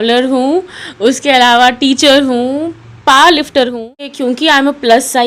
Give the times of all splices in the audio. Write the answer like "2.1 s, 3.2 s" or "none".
4.1 s